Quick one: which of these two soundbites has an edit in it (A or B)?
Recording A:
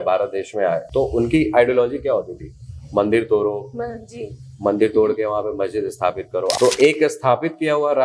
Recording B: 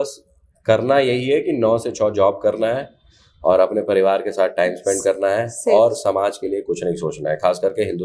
A